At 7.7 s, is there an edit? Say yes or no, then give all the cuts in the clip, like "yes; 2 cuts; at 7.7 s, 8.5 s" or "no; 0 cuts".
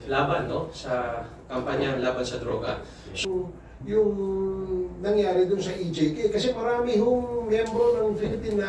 no; 1 cut; at 3.2 s